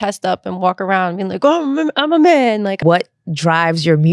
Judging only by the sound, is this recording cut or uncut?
cut